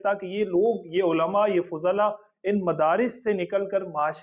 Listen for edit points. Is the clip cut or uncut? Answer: uncut